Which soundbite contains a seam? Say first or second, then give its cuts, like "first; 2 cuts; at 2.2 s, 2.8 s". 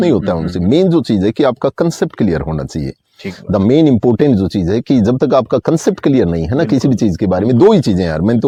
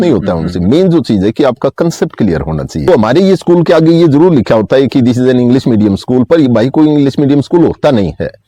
second; 1 cut; at 2.9 s